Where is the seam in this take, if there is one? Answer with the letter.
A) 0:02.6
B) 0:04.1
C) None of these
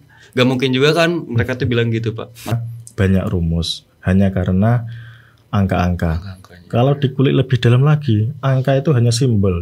A